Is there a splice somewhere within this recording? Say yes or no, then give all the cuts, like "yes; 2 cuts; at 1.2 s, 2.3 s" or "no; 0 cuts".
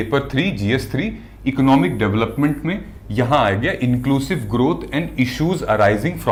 no; 0 cuts